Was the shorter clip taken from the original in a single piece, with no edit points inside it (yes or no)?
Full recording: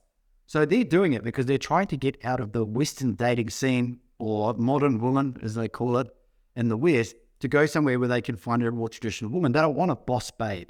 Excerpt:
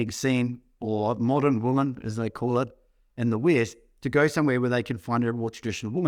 yes